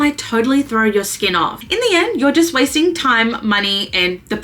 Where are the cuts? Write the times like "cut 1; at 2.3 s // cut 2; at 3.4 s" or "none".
cut 1; at 1.6 s